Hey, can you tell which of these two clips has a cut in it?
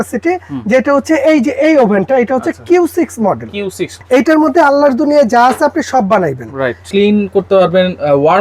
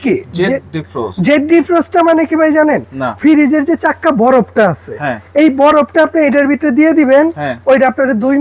first; 2 cuts; at 3.9 s, 6.8 s

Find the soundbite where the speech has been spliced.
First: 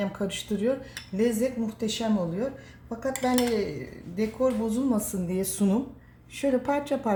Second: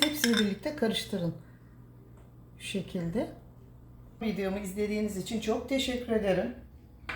second; 1 cut; at 4.2 s

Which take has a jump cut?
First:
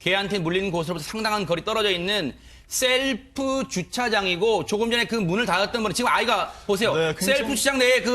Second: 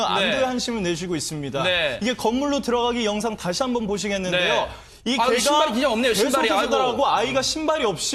first; 1 cut; at 5.0 s

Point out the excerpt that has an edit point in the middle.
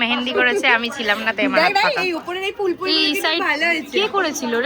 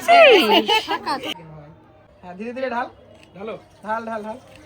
second; 1 cut; at 1.3 s

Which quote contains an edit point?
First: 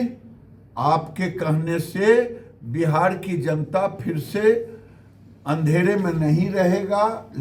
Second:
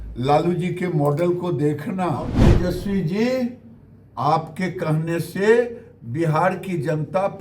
second; 1 cut; at 2.5 s

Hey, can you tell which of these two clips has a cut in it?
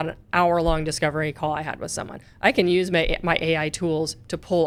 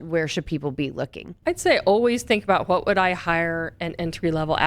second; 1 cut; at 1.3 s

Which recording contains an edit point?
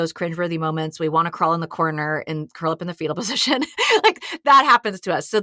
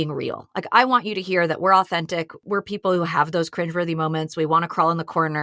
second; 1 cut; at 2.3 s

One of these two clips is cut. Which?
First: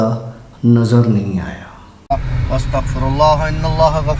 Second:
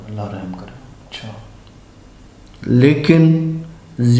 first; 1 cut; at 1.9 s

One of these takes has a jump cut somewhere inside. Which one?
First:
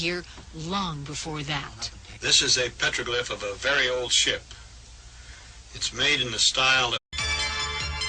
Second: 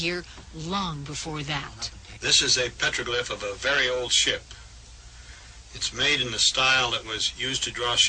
second; 1 cut; at 7.0 s

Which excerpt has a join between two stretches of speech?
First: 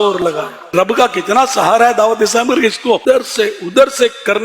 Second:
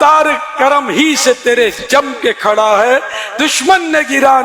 first; 2 cuts; at 0.7 s, 3.0 s

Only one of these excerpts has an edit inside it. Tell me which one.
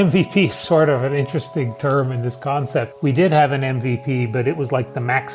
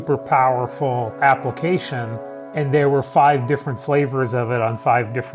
first; 1 cut; at 2.9 s

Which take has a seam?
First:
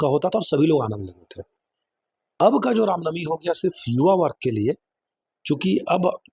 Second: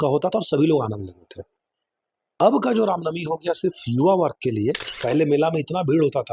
second; 1 cut; at 4.9 s

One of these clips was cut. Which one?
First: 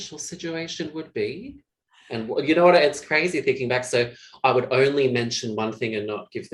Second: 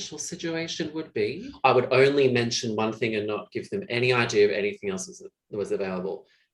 second; 1 cut; at 1.5 s

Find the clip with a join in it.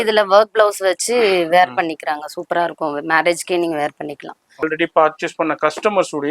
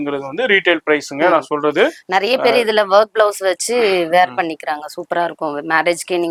first; 1 cut; at 4.6 s

